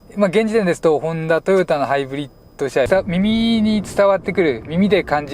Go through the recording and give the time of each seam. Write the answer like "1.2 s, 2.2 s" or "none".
2.9 s